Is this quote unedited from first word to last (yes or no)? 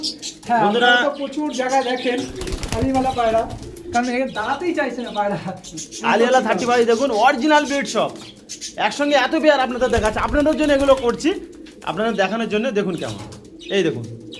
yes